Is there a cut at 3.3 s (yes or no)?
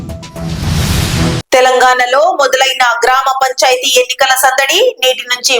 no